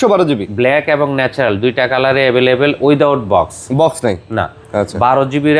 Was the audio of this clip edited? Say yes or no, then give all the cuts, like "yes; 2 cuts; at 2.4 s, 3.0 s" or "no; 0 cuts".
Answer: no; 0 cuts